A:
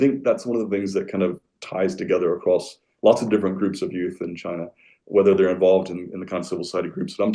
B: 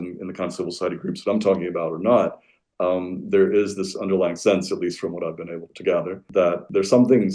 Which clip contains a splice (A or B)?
B